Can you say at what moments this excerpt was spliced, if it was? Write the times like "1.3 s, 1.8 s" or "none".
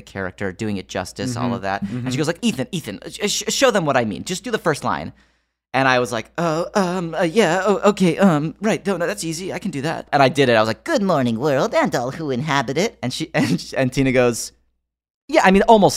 2.4 s, 10.1 s